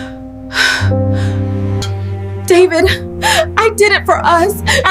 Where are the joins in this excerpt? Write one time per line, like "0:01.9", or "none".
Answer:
0:01.8